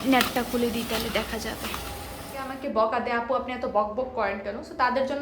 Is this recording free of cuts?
no; 1 cut; at 2.5 s

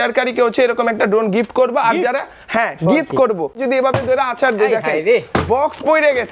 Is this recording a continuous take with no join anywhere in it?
no; 1 cut; at 3.6 s

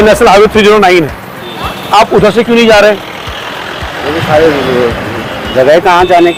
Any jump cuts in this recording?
no; 0 cuts

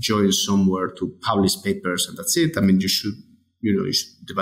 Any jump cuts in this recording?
no; 0 cuts

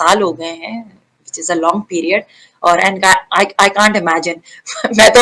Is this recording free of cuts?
yes; 0 cuts

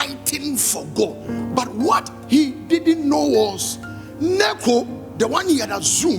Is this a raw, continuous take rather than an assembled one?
no; 1 cut; at 1.2 s

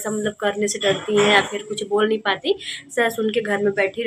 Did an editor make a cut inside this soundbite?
no; 0 cuts

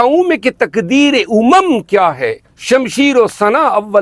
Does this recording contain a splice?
no; 0 cuts

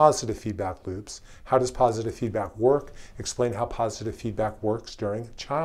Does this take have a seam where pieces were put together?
no; 0 cuts

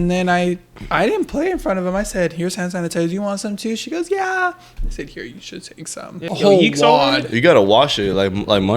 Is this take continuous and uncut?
no; 1 cut; at 6.2 s

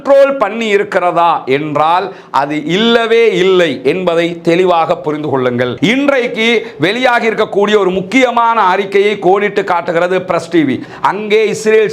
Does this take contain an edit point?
yes; 2 cuts; at 5.7 s, 10.9 s

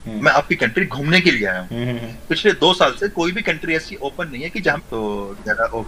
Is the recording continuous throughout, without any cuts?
no; 1 cut; at 4.8 s

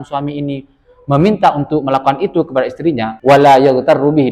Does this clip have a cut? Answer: yes; 1 cut; at 3.1 s

